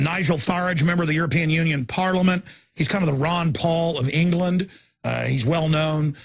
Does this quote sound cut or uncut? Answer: uncut